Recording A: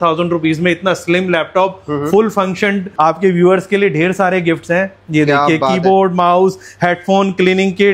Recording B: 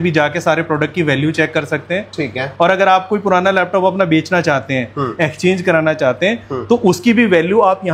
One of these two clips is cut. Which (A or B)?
A